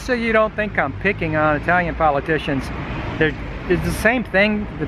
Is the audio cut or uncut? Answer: uncut